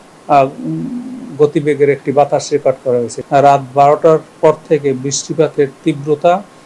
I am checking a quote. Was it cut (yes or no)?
yes